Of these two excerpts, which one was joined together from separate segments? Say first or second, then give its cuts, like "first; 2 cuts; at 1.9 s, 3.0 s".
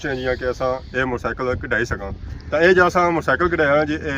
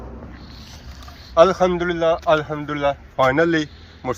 first; 1 cut; at 2.2 s